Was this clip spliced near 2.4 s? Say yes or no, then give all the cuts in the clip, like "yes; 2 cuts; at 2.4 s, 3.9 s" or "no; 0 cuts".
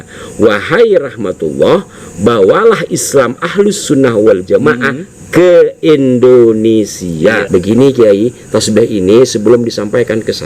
no; 1 cut; at 7.4 s